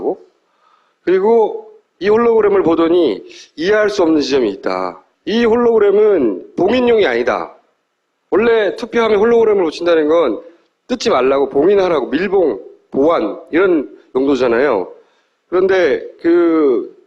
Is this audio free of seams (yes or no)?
yes